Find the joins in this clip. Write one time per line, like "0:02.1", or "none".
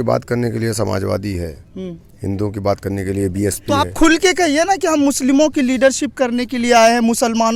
none